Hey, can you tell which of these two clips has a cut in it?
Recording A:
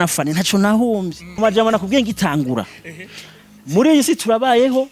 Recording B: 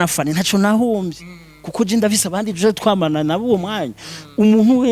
A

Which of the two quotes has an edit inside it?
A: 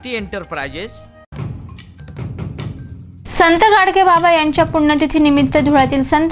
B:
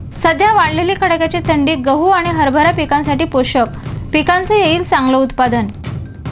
A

